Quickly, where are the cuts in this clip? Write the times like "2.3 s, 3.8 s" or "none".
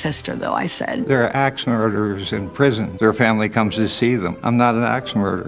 1.0 s